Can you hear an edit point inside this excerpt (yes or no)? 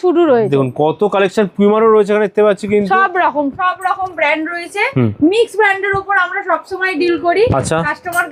no